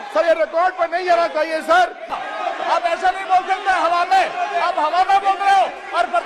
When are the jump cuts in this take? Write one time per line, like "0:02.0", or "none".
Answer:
0:02.1